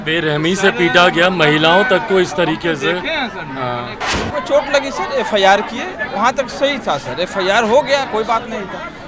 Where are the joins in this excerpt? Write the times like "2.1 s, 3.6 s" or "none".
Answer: 4.1 s